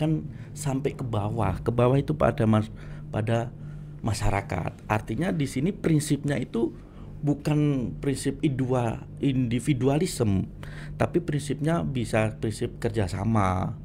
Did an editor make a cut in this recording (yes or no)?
no